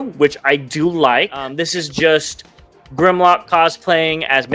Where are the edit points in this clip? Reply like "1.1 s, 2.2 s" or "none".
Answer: 1.5 s